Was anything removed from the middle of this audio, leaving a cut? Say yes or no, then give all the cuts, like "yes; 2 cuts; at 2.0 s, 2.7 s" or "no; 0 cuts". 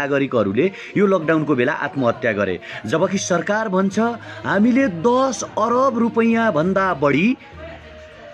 no; 0 cuts